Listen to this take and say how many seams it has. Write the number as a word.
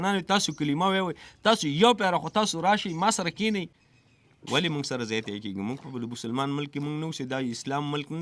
one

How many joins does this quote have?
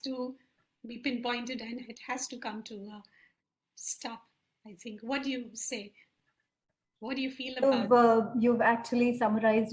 zero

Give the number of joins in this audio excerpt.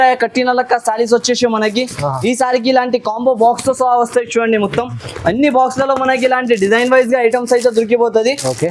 zero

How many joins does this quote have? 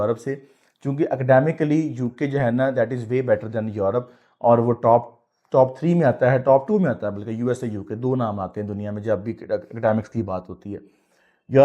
zero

